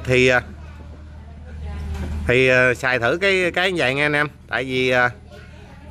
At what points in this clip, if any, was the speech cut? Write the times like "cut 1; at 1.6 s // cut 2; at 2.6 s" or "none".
none